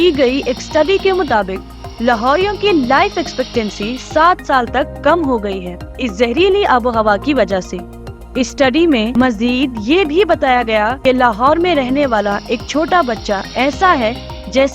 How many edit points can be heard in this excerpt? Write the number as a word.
zero